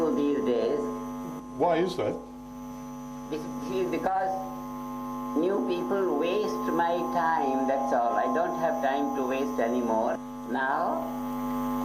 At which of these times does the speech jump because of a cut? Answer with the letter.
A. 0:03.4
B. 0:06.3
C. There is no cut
B